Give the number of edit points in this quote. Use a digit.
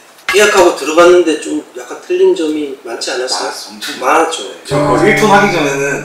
1